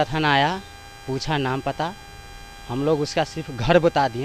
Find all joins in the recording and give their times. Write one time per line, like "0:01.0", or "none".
none